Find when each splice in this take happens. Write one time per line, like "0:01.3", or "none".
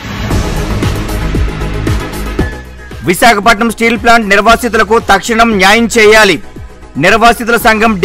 0:01.2
0:02.3